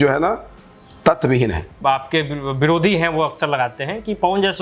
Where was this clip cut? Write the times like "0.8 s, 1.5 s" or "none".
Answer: 1.7 s